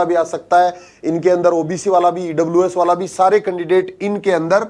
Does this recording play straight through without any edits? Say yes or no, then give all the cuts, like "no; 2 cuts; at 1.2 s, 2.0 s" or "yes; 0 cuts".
yes; 0 cuts